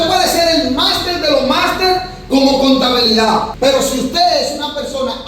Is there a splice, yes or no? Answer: yes